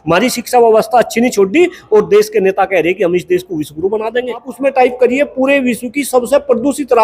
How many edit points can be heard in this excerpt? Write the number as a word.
one